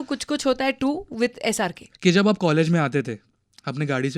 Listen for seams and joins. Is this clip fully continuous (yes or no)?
no